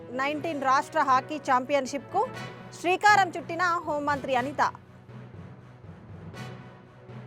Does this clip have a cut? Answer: no; 0 cuts

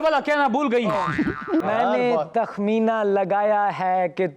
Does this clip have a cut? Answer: yes; 1 cut; at 1.7 s

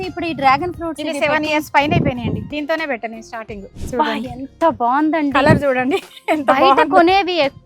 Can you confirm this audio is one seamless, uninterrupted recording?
no; 2 cuts; at 2.5 s, 3.7 s

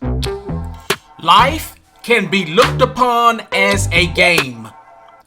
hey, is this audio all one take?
no; 1 cut; at 1.1 s

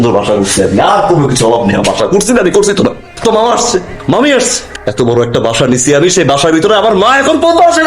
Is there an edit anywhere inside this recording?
yes; 1 cut; at 4.7 s

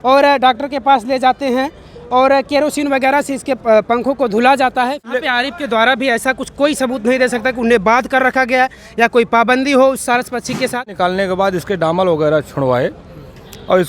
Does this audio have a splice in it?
yes; 2 cuts; at 5.0 s, 10.9 s

